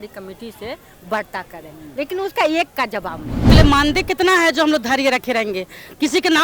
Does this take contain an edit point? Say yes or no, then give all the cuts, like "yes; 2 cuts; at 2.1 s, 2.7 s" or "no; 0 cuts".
yes; 1 cut; at 3.5 s